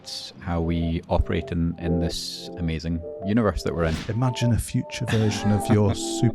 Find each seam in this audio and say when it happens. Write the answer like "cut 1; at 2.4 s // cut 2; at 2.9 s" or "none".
cut 1; at 4.0 s